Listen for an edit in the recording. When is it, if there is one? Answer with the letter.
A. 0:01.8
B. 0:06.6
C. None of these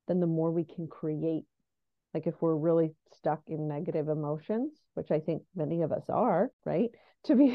B